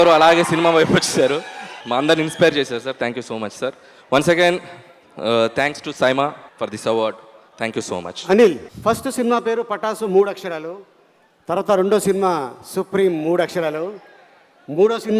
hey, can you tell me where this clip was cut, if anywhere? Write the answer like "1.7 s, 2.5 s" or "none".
none

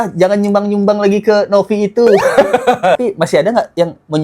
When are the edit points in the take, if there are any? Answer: 3.0 s

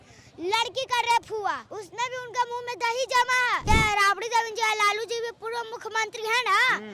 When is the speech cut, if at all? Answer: 1.8 s, 3.6 s

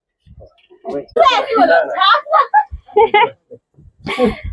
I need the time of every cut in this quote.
1.2 s

